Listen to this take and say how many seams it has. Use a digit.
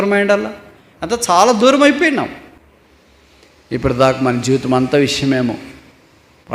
1